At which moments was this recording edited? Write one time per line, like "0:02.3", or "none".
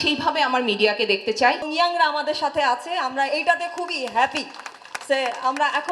0:01.6